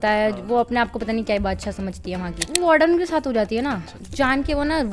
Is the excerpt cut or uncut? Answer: cut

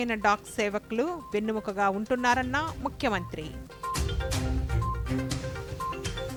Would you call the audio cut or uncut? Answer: uncut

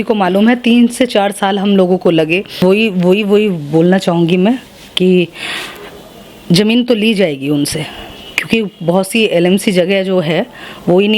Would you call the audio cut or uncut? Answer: cut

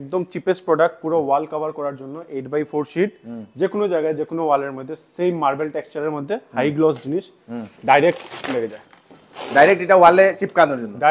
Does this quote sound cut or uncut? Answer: uncut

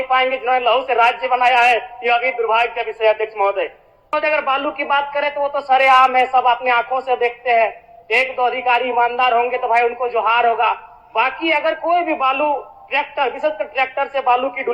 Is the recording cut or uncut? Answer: cut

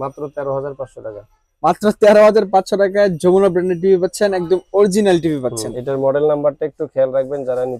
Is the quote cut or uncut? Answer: uncut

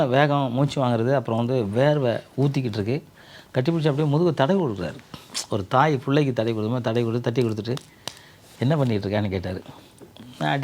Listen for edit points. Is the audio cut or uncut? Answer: uncut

